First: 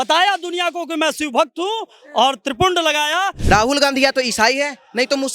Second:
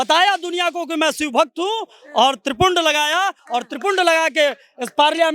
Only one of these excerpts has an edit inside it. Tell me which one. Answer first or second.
first